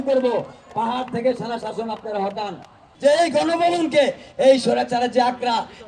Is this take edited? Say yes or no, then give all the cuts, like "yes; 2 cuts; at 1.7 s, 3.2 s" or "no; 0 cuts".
yes; 1 cut; at 2.8 s